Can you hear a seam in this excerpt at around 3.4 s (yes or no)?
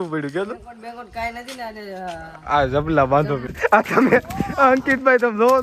yes